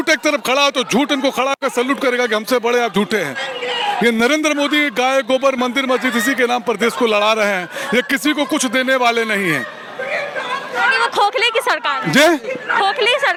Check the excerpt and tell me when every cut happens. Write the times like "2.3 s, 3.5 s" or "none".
none